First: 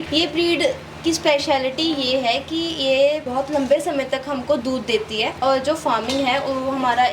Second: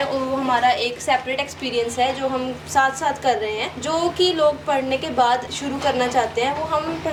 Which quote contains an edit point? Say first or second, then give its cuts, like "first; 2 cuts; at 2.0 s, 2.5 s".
first; 1 cut; at 5.3 s